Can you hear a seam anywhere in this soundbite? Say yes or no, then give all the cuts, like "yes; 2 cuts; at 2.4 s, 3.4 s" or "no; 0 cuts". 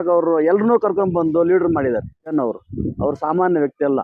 yes; 1 cut; at 2.3 s